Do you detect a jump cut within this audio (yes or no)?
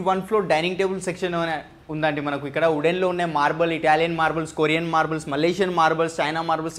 no